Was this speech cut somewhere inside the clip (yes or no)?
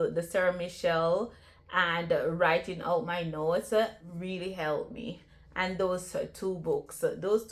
no